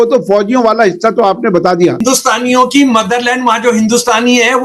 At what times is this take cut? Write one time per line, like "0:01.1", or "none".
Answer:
0:02.0